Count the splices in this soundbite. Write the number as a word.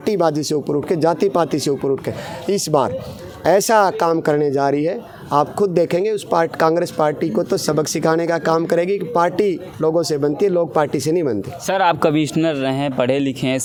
zero